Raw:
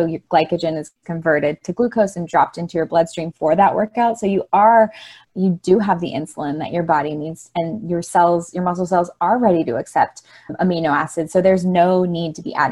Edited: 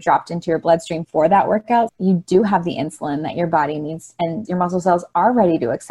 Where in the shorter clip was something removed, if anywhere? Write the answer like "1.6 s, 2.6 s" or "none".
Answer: 1.9 s, 4.4 s